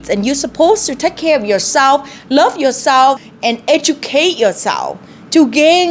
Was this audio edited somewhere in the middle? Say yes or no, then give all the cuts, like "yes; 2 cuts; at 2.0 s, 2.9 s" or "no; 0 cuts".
yes; 1 cut; at 3.3 s